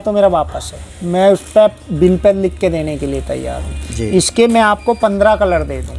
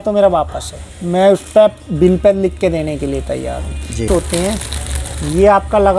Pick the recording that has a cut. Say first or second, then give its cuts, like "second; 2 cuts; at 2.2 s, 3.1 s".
second; 1 cut; at 4.1 s